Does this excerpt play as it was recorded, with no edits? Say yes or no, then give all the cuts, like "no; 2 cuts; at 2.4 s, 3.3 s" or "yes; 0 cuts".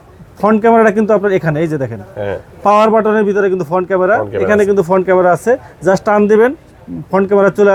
yes; 0 cuts